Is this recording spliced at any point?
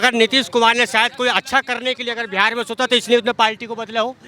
no; 0 cuts

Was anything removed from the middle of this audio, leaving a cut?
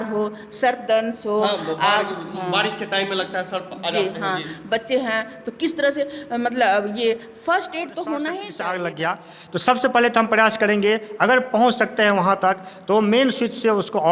yes; 1 cut; at 8.6 s

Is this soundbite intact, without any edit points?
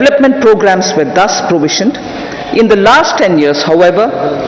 yes; 0 cuts

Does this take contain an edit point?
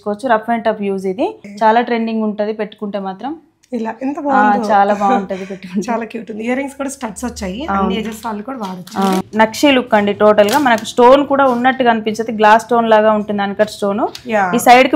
yes; 2 cuts; at 1.4 s, 9.3 s

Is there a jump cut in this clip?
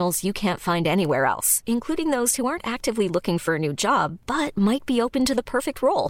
no; 0 cuts

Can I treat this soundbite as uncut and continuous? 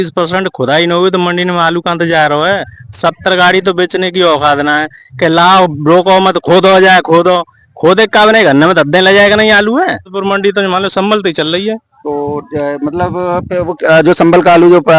no; 1 cut; at 10.2 s

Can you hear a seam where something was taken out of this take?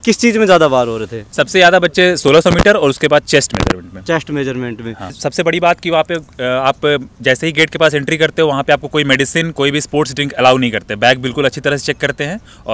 yes; 1 cut; at 5.2 s

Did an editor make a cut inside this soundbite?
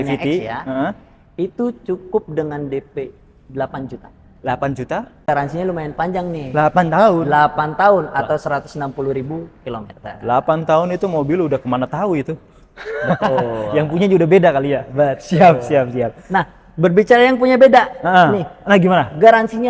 yes; 1 cut; at 5.2 s

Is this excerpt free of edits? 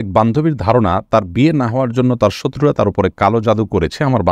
yes; 0 cuts

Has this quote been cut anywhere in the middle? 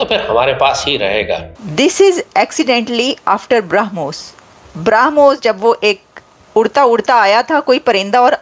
yes; 1 cut; at 1.6 s

